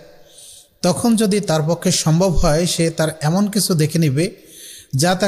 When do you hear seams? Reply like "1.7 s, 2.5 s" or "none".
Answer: none